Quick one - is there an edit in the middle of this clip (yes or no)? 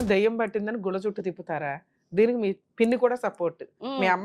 yes